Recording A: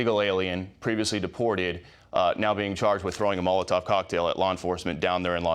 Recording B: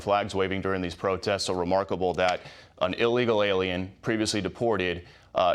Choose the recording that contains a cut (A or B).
A